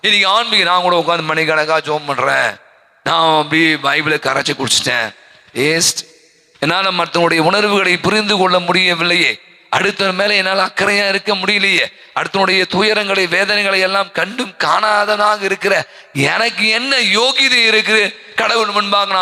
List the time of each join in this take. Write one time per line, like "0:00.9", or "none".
none